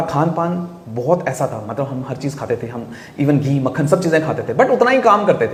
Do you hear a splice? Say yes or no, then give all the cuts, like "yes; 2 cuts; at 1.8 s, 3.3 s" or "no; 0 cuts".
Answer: no; 0 cuts